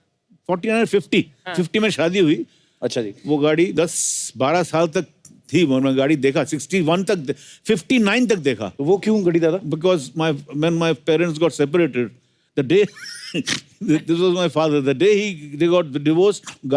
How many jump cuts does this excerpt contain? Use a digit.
1